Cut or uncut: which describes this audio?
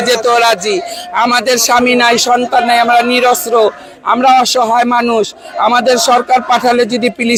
uncut